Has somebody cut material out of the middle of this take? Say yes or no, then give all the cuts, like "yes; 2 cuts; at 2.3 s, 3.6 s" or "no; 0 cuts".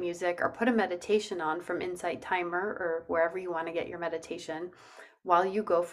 no; 0 cuts